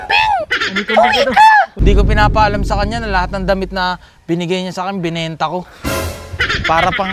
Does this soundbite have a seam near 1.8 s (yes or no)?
yes